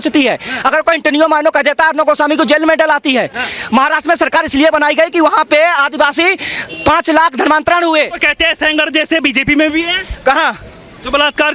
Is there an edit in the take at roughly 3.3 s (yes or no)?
no